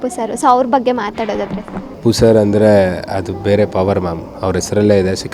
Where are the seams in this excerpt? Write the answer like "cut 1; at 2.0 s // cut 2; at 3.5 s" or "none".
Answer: cut 1; at 1.9 s